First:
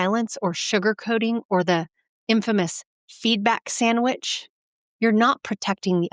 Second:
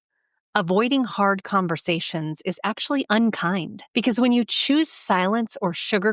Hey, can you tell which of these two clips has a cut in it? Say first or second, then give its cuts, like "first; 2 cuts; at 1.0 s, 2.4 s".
second; 1 cut; at 3.8 s